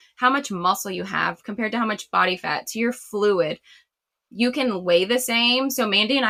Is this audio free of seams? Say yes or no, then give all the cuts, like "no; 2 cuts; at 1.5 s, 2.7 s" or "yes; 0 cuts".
yes; 0 cuts